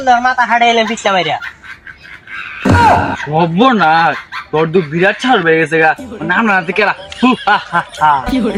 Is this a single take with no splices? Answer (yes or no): yes